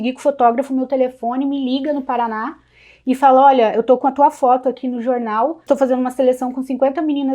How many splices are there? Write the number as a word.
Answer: one